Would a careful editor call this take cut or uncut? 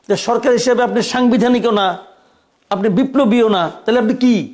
uncut